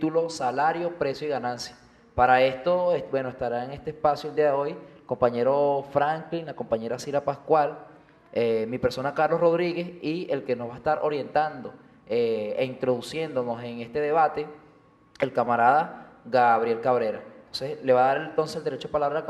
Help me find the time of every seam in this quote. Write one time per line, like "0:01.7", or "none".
0:17.5